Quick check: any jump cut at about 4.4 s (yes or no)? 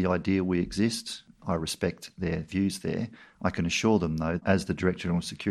yes